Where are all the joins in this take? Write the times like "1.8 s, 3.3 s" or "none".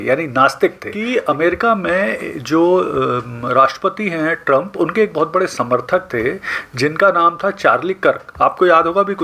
0.9 s